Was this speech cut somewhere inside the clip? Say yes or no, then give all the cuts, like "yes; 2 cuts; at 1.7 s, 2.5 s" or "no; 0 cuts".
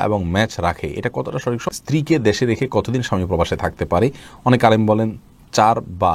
yes; 1 cut; at 1.7 s